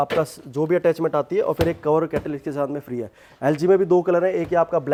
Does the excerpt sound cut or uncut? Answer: uncut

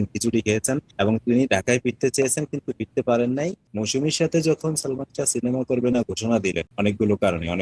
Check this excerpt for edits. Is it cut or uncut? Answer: cut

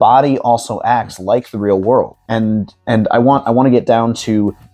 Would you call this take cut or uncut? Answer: uncut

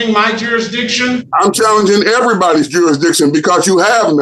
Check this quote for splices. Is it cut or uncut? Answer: uncut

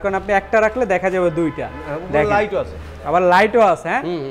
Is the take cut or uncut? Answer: uncut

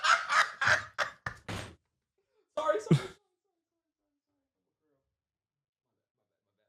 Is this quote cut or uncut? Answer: uncut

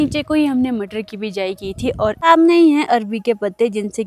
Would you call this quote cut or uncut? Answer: cut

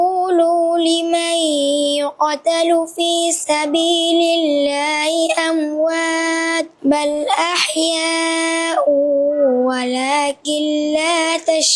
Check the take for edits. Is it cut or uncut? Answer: uncut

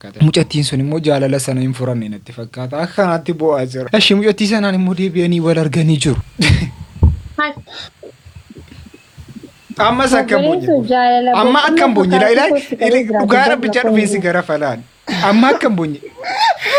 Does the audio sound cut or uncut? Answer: uncut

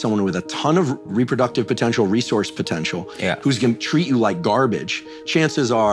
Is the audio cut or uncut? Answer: uncut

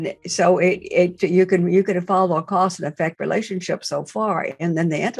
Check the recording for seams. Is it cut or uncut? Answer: cut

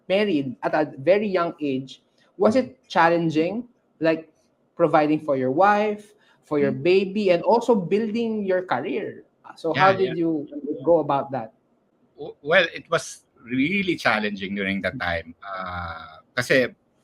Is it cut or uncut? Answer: uncut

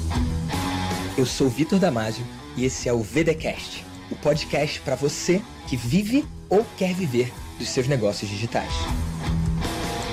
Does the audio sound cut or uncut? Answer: uncut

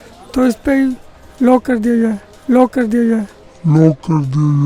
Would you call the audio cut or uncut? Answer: uncut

